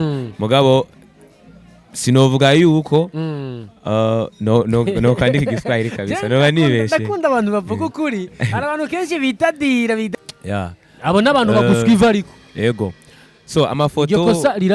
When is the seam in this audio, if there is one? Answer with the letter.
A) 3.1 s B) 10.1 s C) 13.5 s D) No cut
B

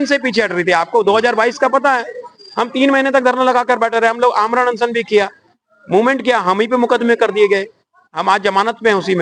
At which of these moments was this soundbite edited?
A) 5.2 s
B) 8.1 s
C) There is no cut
C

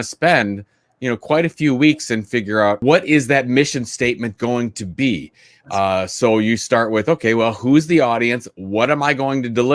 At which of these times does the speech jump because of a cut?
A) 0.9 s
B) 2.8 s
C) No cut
B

